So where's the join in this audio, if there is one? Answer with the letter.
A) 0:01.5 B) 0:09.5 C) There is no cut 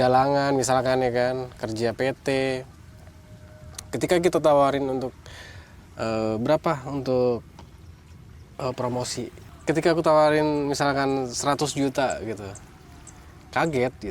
B